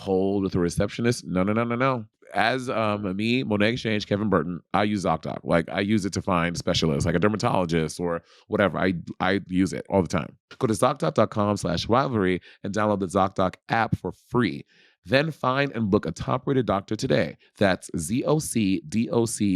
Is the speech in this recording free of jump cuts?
no; 1 cut; at 2.2 s

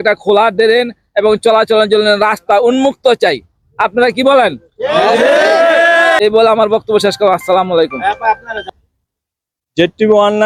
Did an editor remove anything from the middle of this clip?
no; 0 cuts

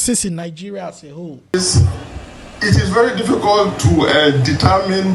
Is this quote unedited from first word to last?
no; 1 cut; at 1.5 s

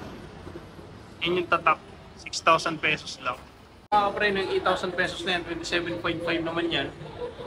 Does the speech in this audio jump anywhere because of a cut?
yes; 1 cut; at 3.9 s

